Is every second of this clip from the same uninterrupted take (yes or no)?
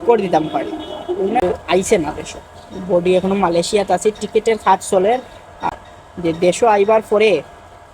no